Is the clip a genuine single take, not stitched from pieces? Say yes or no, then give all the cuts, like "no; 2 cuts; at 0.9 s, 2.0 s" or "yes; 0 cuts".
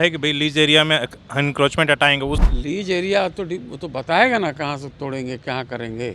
no; 1 cut; at 2.5 s